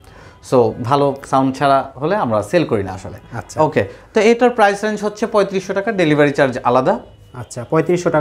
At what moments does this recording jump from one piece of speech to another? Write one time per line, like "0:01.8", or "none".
none